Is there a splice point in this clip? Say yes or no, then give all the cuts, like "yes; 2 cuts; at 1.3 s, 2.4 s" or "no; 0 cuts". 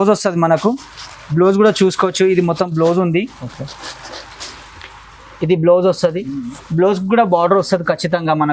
no; 0 cuts